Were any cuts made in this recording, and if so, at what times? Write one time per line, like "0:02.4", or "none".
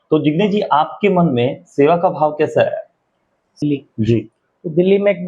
0:03.6